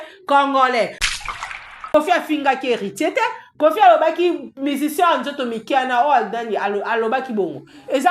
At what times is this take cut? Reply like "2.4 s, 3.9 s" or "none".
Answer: 1.2 s